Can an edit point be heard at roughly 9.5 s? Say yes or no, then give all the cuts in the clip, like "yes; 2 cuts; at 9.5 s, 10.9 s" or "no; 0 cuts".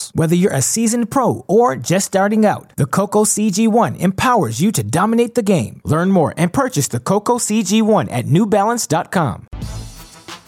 yes; 1 cut; at 9.5 s